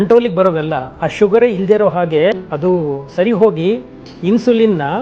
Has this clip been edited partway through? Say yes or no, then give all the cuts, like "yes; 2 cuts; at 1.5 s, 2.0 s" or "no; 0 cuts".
yes; 1 cut; at 2.4 s